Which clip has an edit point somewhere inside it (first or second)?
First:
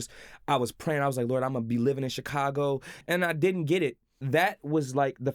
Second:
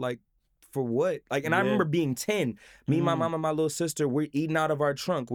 first